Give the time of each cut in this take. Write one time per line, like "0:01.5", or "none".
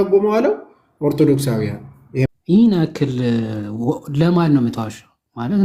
0:02.3